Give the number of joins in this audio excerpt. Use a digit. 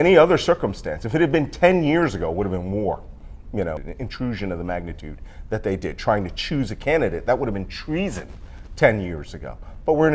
1